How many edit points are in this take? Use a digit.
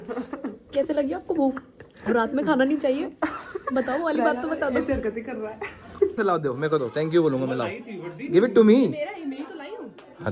1